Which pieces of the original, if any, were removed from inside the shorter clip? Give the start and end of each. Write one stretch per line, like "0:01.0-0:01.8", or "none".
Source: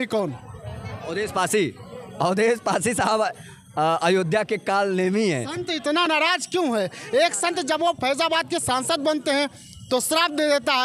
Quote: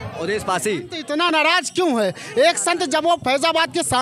0:01.8-0:05.7